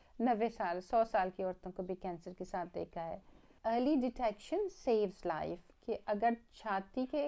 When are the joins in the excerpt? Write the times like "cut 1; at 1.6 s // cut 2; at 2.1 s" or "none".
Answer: cut 1; at 3.5 s